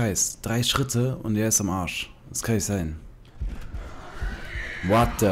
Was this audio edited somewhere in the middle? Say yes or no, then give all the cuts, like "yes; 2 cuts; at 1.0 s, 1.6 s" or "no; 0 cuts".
yes; 1 cut; at 3.3 s